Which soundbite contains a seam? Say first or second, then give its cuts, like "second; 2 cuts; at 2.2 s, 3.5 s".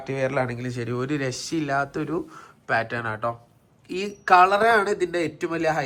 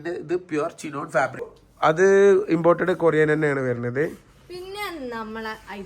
second; 1 cut; at 1.6 s